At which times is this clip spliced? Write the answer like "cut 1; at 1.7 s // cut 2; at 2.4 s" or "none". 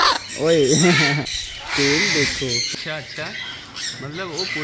cut 1; at 1.2 s // cut 2; at 2.7 s